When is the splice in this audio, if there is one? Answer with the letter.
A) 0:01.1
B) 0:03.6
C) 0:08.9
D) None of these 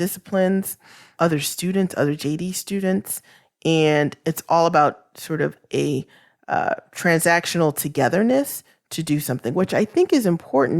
A